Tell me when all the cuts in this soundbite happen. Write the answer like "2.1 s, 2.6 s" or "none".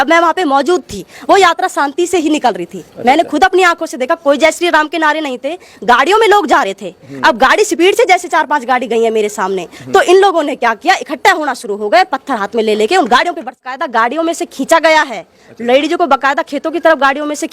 13.8 s

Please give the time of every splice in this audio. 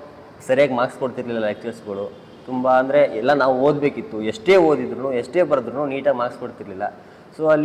none

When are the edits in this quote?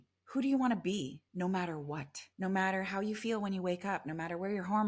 1.2 s, 2.2 s

